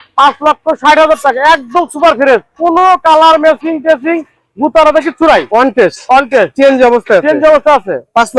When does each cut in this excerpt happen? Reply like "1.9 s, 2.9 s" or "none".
none